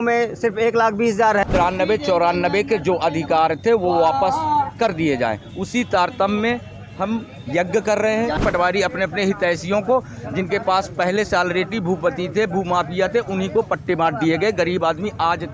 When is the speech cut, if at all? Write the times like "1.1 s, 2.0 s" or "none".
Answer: 1.4 s, 8.4 s